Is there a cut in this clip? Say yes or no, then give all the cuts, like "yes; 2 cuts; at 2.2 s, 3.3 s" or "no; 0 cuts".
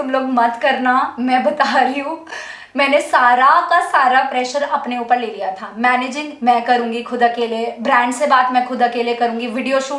no; 0 cuts